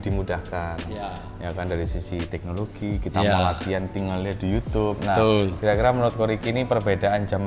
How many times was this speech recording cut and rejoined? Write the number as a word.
zero